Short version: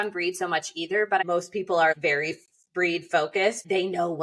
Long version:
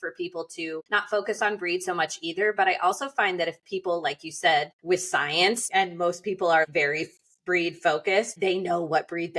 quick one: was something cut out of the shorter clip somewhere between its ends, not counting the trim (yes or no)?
yes